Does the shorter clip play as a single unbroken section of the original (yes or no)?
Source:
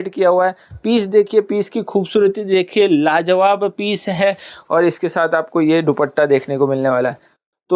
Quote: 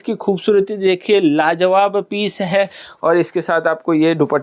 yes